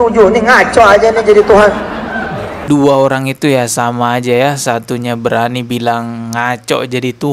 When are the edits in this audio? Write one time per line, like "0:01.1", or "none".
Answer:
0:02.6